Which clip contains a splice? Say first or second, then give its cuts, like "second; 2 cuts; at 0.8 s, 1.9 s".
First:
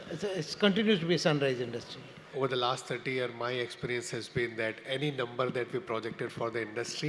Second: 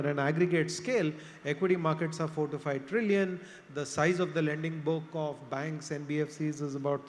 first; 1 cut; at 2.2 s